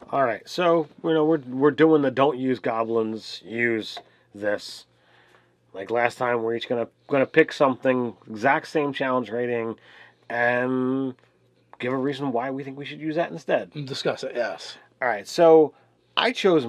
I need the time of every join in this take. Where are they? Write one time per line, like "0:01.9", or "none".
0:13.7

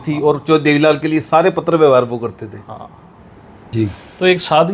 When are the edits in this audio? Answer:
0:03.6

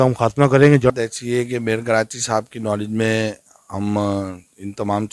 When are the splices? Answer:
0:00.9

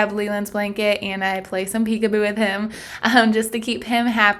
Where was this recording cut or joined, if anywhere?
none

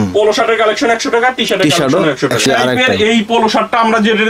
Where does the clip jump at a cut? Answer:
0:02.5

